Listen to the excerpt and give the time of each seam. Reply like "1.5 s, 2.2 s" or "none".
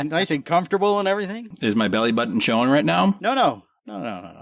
1.5 s, 3.2 s